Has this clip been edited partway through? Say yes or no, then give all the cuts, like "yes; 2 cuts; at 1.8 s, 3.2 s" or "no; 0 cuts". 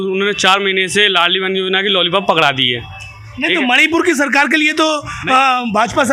no; 0 cuts